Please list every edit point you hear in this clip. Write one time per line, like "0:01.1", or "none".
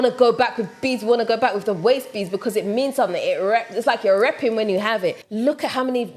0:05.2